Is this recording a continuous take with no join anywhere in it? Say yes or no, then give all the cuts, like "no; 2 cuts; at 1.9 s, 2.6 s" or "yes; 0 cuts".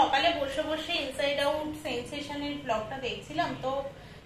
yes; 0 cuts